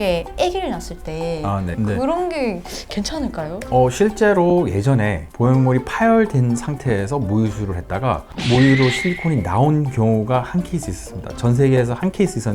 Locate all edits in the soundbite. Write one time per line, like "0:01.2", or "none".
0:01.7